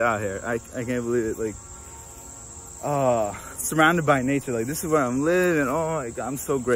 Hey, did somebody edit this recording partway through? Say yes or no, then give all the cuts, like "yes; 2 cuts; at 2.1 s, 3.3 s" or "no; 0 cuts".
no; 0 cuts